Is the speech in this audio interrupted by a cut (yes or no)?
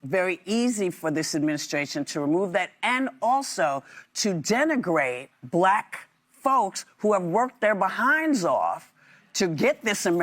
yes